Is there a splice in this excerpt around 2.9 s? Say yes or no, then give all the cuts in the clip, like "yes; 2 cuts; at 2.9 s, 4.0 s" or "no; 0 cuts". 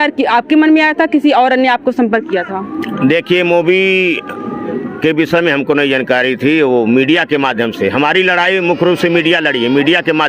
no; 0 cuts